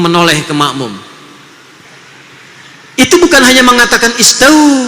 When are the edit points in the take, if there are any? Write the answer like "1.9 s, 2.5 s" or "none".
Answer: 1.9 s